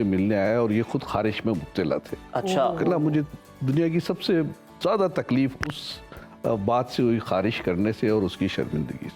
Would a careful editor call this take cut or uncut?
uncut